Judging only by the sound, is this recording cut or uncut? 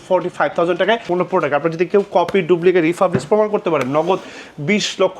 cut